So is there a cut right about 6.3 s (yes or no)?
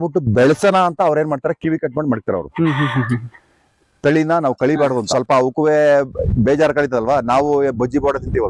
no